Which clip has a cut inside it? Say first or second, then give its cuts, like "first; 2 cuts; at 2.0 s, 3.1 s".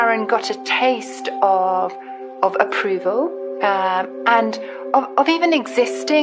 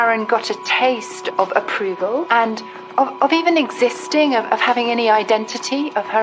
second; 2 cuts; at 1.1 s, 2.3 s